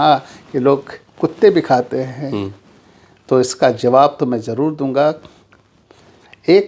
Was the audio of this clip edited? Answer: no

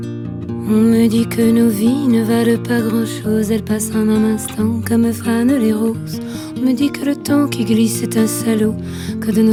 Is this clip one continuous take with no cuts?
yes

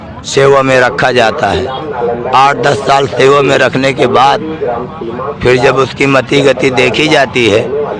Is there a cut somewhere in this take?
no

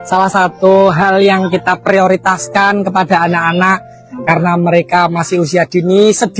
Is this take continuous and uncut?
yes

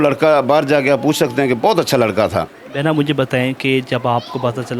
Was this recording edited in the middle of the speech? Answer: yes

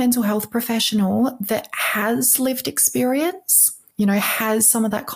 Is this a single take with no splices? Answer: no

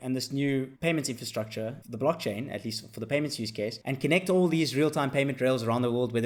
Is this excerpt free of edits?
yes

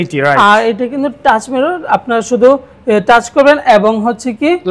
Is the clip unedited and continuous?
yes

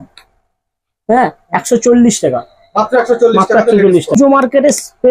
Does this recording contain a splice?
yes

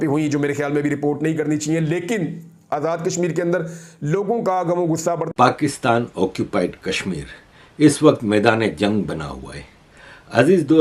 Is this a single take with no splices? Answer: no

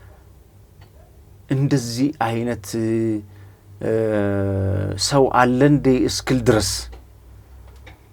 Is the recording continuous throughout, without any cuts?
yes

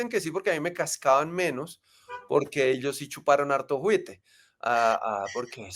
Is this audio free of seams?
yes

